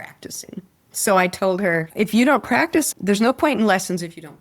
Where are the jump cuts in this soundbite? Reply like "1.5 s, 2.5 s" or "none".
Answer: 2.9 s